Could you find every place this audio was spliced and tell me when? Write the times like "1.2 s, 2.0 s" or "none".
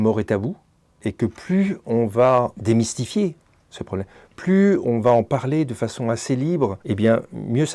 2.6 s, 6.8 s